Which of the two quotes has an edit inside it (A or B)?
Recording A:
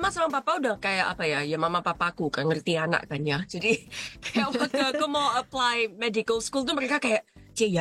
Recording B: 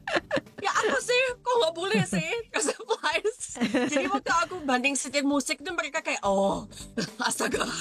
B